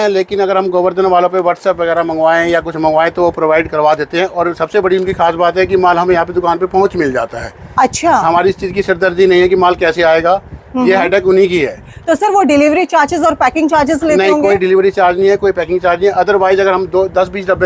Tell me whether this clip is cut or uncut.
uncut